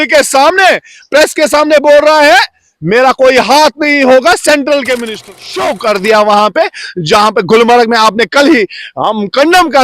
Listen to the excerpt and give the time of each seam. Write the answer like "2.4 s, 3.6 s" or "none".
5.3 s